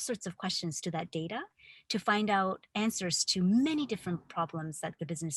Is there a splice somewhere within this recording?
yes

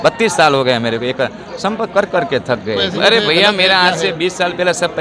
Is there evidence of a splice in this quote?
yes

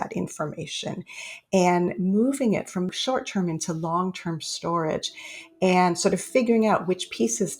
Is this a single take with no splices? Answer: no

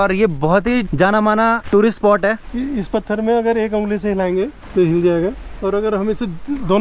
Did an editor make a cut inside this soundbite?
yes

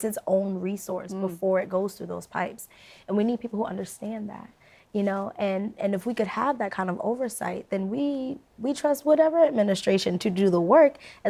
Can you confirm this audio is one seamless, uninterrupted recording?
yes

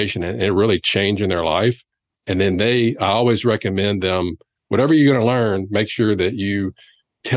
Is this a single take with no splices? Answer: yes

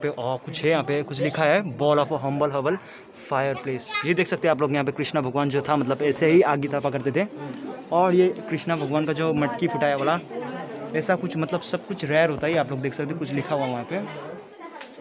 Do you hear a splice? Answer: no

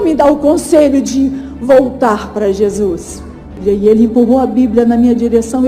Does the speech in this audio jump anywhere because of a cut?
yes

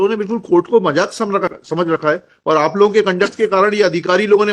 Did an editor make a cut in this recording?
yes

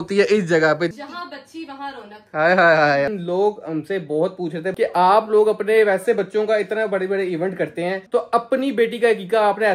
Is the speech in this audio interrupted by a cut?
yes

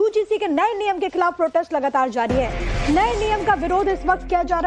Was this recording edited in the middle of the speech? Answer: yes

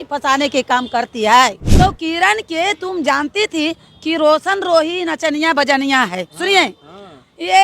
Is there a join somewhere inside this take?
yes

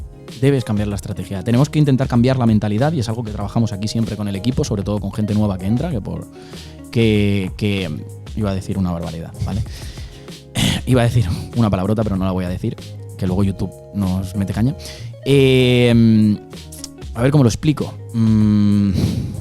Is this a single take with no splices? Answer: yes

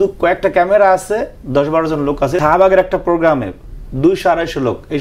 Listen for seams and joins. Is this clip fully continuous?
no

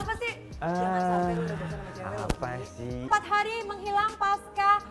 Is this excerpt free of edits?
no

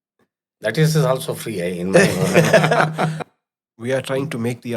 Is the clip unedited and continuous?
no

